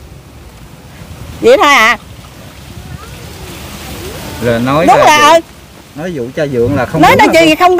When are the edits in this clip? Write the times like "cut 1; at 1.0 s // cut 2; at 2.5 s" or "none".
none